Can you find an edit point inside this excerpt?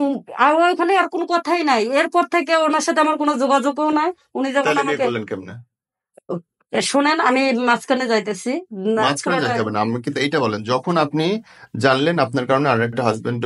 no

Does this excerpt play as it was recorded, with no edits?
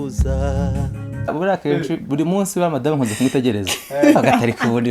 no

